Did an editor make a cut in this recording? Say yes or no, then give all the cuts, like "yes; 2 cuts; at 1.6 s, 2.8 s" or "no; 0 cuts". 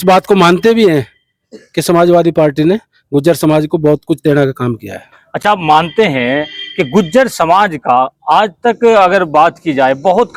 no; 0 cuts